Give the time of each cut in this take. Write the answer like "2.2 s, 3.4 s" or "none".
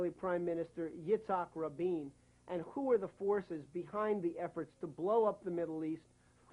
3.1 s